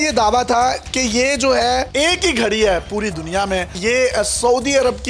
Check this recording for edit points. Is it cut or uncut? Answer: cut